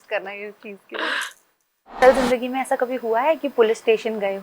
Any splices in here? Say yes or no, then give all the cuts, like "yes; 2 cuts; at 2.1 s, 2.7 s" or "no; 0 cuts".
yes; 1 cut; at 2.0 s